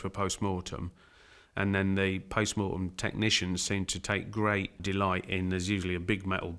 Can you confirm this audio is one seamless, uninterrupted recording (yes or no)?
yes